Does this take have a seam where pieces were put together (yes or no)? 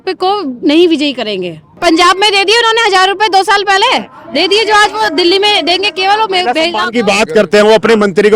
yes